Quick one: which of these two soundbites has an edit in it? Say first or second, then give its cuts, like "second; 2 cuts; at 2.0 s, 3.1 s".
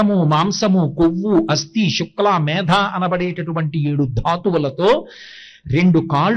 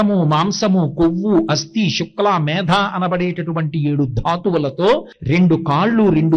second; 1 cut; at 5.1 s